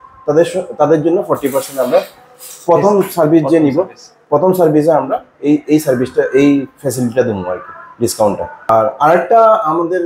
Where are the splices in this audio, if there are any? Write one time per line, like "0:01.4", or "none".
0:08.7